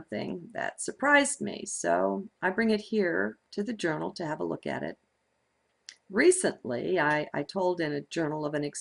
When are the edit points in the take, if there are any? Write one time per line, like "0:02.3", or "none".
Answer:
none